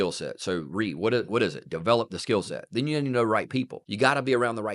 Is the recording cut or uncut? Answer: cut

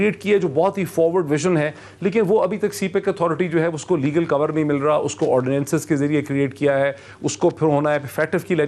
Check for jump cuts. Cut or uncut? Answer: uncut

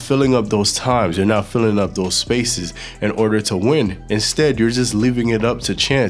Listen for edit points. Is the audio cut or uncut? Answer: uncut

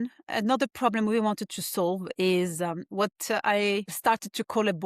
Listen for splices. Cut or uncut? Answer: cut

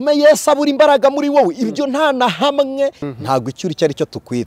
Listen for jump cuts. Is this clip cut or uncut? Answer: cut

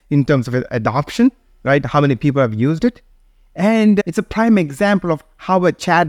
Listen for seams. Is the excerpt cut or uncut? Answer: cut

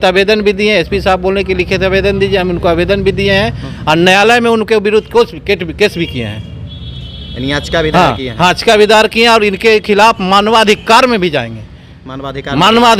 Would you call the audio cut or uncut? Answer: uncut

